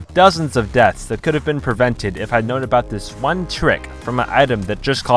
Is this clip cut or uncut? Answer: uncut